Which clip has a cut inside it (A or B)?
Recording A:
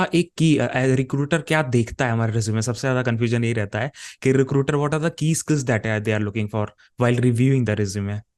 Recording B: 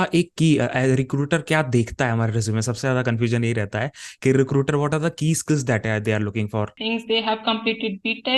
B